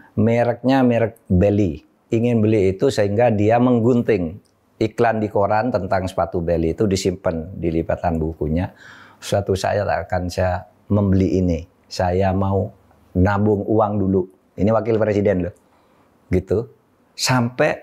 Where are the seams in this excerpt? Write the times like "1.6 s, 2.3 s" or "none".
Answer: 1.9 s

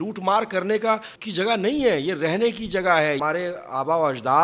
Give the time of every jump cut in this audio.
1.2 s, 3.2 s

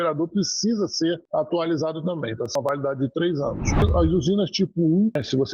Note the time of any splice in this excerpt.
3.8 s

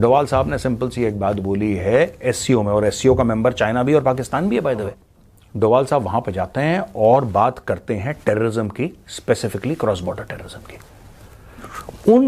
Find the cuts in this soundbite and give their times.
5.0 s

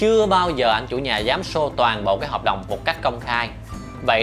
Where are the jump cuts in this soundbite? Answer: none

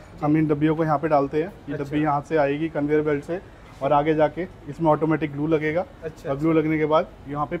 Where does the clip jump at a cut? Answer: none

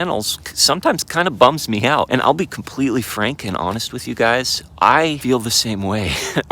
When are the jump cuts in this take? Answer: 2.1 s, 5.2 s

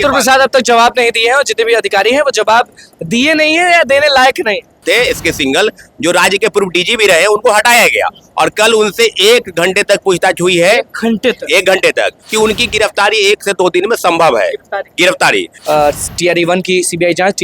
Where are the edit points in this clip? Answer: 4.8 s, 12.2 s, 15.5 s

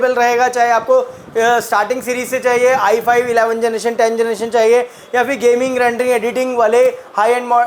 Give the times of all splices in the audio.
none

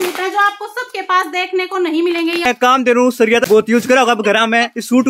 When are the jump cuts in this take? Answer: 2.5 s, 3.6 s

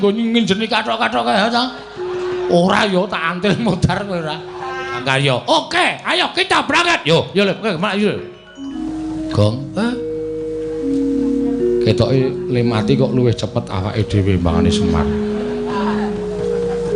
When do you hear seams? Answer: 5.0 s, 8.8 s

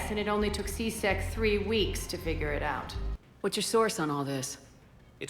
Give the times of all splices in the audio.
2.8 s

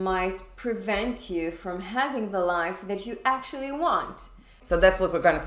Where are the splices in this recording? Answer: 4.6 s

